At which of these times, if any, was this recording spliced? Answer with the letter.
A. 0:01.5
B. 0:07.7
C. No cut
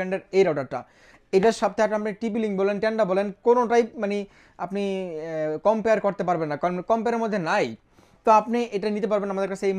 C